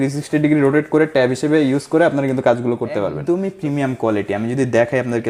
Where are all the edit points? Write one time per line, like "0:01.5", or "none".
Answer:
0:03.2